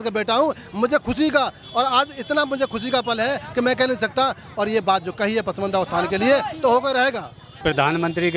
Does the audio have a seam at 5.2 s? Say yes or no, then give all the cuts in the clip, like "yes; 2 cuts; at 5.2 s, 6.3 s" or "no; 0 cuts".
no; 1 cut; at 7.5 s